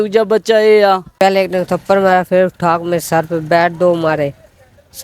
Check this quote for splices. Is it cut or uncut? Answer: cut